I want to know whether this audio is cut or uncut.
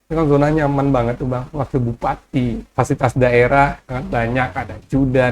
cut